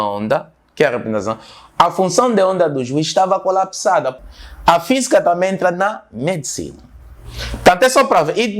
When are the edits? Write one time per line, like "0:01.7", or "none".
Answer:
0:04.2